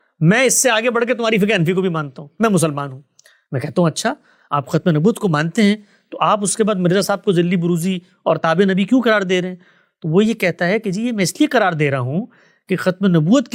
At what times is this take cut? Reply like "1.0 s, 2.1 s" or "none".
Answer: none